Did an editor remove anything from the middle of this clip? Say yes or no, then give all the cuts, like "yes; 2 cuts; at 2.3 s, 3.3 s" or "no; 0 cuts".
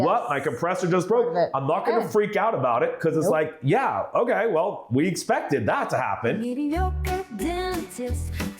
yes; 1 cut; at 6.4 s